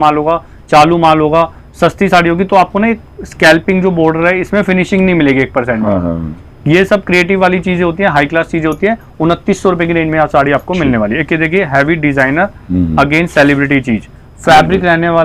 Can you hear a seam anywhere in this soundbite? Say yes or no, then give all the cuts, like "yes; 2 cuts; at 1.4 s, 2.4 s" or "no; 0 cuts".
no; 0 cuts